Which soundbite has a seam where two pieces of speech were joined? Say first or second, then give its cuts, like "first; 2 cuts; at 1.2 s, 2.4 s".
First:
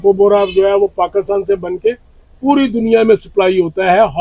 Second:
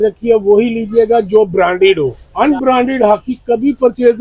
second; 1 cut; at 2.2 s